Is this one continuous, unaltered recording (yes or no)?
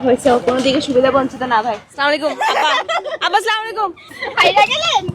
no